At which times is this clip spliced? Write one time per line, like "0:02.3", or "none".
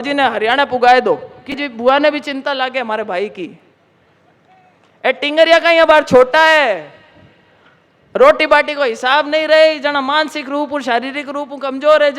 0:01.5